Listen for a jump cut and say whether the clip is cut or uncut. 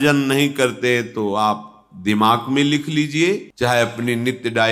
uncut